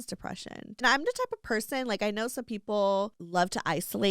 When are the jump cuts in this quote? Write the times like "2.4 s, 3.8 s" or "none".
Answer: 0.8 s, 3.2 s